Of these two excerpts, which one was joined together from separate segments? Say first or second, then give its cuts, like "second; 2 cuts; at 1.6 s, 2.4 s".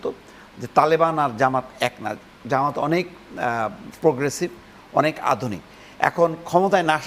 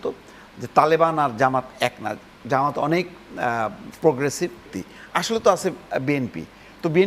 second; 1 cut; at 4.8 s